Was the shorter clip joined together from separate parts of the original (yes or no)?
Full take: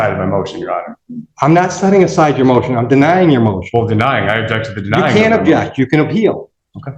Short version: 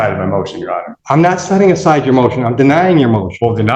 yes